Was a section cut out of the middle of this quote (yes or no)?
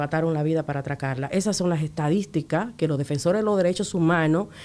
no